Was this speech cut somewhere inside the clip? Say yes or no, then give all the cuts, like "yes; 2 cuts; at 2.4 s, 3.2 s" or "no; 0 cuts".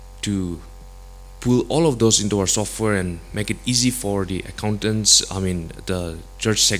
no; 0 cuts